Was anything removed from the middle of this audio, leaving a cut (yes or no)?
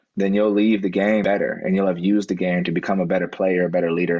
yes